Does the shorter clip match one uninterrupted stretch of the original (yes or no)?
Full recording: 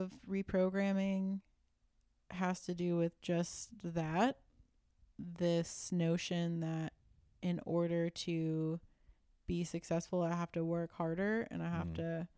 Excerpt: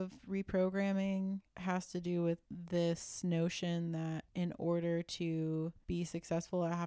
no